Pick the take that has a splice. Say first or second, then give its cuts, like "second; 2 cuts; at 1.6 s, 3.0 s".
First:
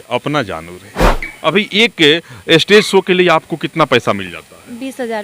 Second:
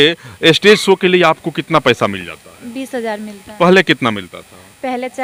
first; 1 cut; at 1.1 s